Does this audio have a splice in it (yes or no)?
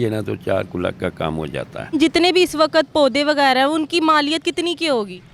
yes